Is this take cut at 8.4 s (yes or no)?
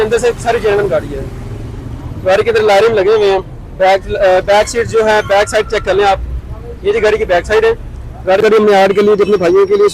yes